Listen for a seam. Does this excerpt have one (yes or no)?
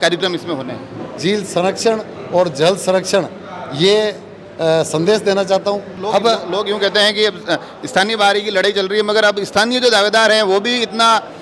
yes